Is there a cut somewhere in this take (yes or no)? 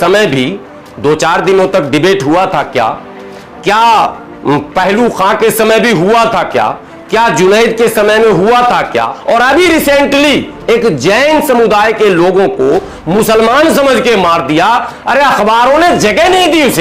yes